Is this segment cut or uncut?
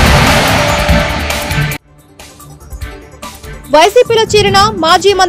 cut